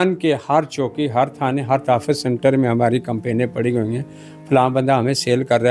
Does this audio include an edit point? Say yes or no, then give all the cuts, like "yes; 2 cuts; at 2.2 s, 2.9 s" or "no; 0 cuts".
no; 0 cuts